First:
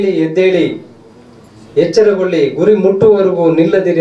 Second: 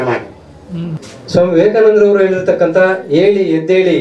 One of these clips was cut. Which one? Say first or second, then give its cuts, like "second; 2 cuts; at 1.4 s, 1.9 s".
second; 1 cut; at 0.9 s